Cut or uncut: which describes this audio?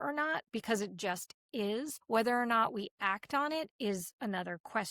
cut